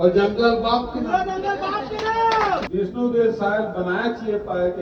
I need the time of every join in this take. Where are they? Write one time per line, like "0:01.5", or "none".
0:02.7